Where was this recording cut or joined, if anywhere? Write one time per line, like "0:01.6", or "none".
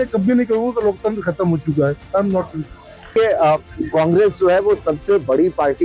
0:03.1